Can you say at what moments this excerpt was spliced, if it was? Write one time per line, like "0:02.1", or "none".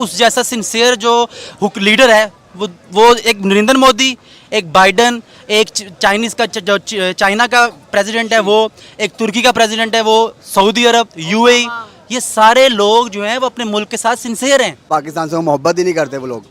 0:14.9